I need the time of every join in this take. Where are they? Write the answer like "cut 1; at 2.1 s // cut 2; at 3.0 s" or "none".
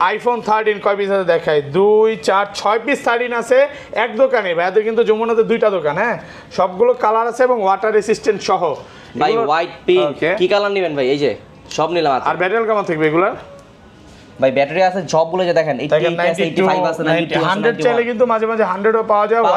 none